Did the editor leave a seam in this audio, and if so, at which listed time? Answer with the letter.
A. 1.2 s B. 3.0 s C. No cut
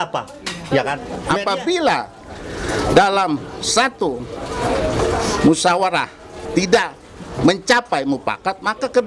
A